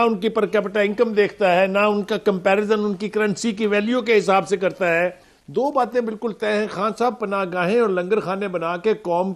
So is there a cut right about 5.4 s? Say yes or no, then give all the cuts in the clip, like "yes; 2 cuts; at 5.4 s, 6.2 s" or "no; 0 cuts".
yes; 1 cut; at 5.4 s